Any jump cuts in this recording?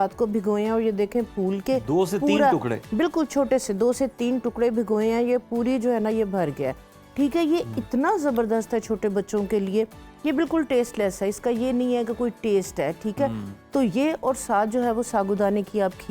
no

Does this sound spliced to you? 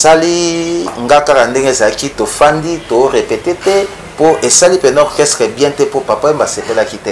no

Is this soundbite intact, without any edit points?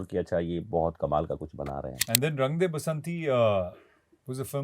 no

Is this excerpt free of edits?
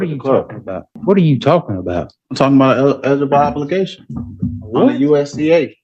no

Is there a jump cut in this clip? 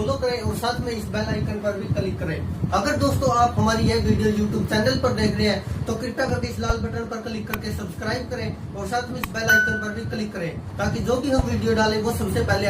no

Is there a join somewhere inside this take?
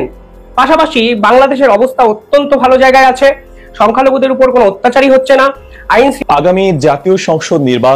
yes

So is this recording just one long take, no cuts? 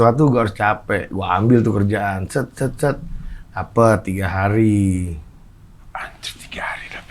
yes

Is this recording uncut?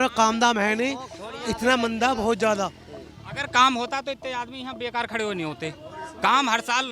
yes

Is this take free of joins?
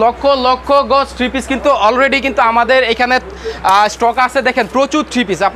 yes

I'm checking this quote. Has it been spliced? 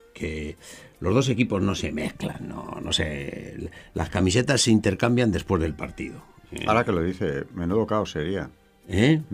yes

